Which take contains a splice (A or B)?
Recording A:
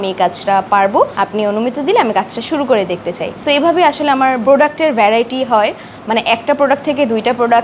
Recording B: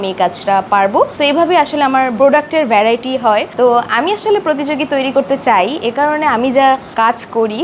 B